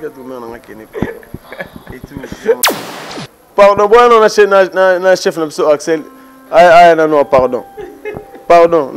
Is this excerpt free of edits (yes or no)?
no